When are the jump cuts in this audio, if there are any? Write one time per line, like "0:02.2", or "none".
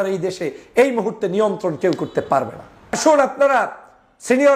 0:03.0